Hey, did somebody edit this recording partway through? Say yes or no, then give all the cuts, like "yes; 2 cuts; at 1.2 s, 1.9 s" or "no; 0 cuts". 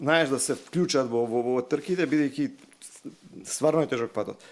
no; 0 cuts